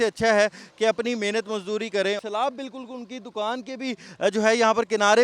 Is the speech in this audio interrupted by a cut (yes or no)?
yes